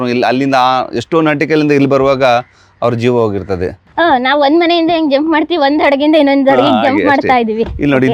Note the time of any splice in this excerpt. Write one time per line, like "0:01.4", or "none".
0:03.8